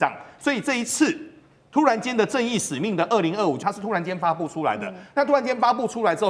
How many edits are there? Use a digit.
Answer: 1